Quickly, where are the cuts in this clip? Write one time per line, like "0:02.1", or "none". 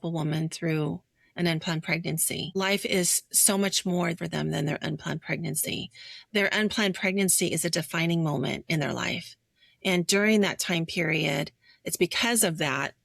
0:02.5
0:04.2